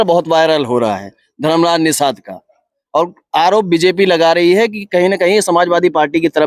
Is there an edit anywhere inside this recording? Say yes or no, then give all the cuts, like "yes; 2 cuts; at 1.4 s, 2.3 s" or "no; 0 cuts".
no; 0 cuts